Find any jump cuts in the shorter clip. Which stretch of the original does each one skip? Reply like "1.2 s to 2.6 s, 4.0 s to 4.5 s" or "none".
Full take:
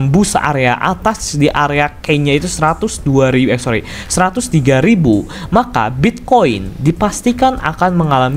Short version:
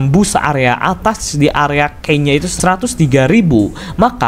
2.5 s to 4.0 s